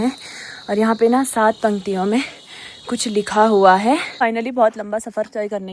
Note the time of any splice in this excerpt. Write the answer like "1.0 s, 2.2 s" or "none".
4.1 s